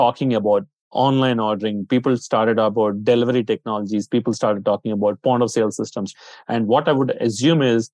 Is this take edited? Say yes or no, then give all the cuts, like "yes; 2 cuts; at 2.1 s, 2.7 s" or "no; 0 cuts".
yes; 1 cut; at 6.0 s